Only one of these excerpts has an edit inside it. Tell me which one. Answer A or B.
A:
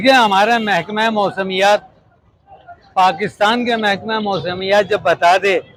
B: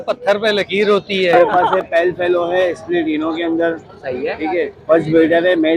B